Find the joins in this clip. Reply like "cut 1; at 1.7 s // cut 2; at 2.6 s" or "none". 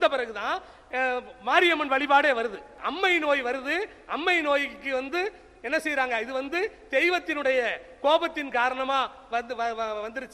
cut 1; at 2.8 s